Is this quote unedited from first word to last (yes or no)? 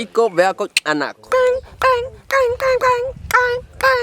no